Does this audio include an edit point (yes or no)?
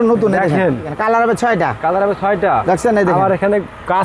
yes